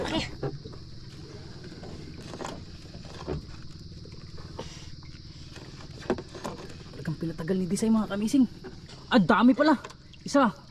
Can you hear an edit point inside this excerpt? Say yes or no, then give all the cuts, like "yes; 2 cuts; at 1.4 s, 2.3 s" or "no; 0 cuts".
yes; 1 cut; at 8.9 s